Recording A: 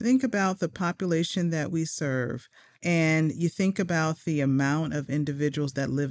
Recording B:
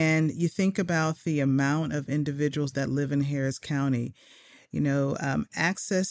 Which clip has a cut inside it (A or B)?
A